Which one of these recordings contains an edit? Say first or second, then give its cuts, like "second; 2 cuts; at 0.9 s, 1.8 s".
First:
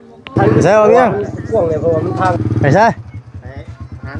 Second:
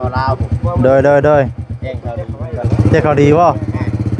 first; 1 cut; at 2.4 s